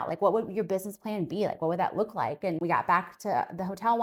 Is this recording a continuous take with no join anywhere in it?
yes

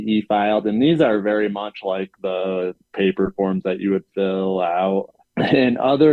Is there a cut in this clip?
yes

